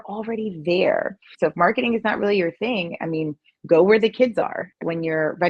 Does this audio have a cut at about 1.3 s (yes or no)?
yes